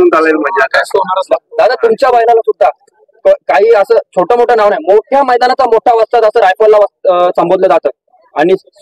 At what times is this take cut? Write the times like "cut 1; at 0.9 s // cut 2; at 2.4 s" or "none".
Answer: none